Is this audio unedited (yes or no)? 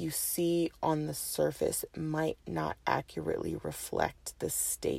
yes